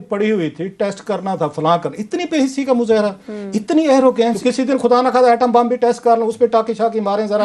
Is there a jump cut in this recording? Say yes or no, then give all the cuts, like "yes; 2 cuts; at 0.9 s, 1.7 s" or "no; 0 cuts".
yes; 1 cut; at 4.4 s